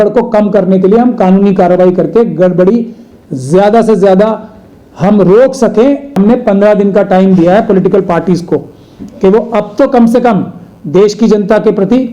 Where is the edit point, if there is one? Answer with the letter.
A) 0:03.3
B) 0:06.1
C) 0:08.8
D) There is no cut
B